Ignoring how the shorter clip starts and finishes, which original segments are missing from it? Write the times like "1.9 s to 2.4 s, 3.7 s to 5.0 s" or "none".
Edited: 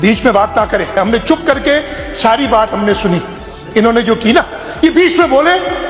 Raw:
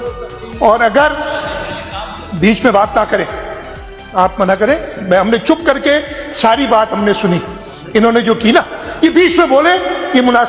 3.4 s to 5.2 s